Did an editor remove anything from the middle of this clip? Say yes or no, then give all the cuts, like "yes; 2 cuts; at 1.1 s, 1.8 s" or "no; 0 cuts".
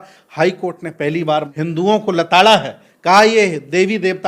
yes; 1 cut; at 1.5 s